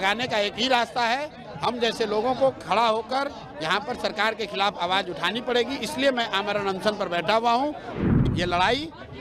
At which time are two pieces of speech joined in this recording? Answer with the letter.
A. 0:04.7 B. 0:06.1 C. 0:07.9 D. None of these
C